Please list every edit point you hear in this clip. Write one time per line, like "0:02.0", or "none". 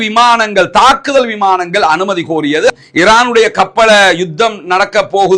0:02.7

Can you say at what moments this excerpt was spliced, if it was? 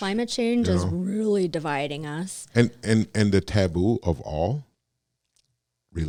none

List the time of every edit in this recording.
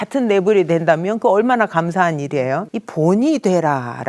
0:02.8

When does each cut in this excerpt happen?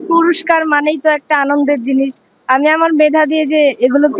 none

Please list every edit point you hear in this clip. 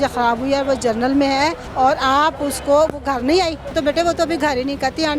0:01.6
0:03.7

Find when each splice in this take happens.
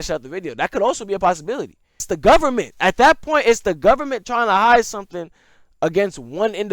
0:02.0

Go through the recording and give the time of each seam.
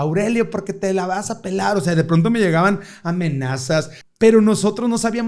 0:04.0

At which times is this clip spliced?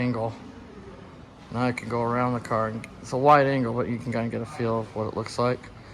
none

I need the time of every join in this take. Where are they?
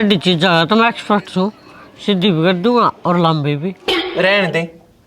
0:03.8

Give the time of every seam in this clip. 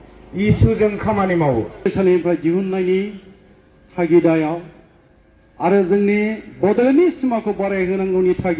0:01.9

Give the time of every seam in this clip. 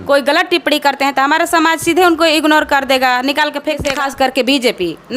0:03.9

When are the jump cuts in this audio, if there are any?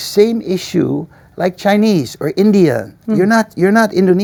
none

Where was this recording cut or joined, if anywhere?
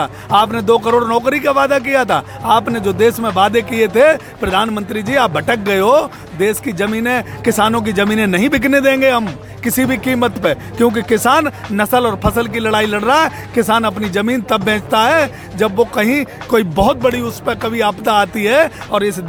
none

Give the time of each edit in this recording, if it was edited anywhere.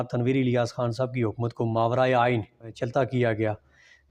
0:02.7

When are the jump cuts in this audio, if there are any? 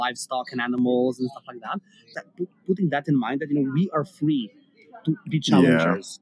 0:02.2

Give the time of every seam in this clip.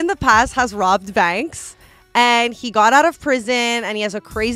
none

